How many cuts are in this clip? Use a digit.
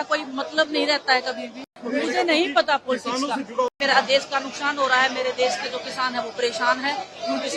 2